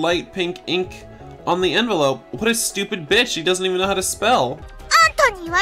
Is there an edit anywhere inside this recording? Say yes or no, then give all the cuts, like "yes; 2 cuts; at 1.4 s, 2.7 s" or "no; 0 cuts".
yes; 1 cut; at 4.7 s